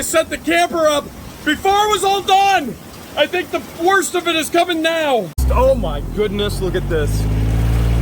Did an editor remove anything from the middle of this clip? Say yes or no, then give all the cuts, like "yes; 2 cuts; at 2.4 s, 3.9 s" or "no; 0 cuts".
yes; 1 cut; at 5.4 s